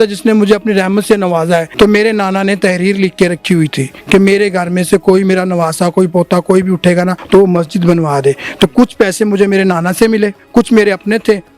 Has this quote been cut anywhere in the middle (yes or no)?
yes